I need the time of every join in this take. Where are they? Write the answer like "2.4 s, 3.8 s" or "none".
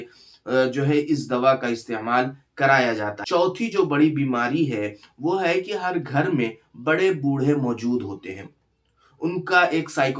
3.2 s